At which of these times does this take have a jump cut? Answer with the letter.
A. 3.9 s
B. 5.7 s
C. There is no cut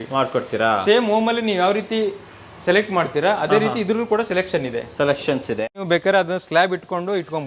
B